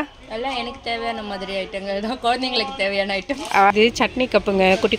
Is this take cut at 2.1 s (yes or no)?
no